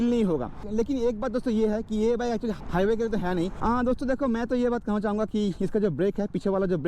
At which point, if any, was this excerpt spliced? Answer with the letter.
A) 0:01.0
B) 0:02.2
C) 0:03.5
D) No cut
C